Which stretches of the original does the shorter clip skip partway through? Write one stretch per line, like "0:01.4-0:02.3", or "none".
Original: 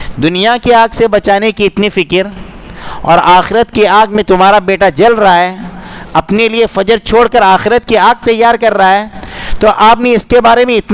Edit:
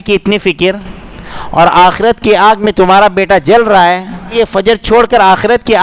0:05.8-0:06.5